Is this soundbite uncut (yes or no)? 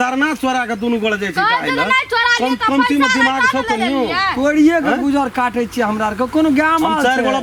yes